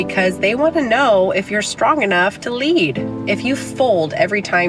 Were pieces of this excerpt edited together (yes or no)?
yes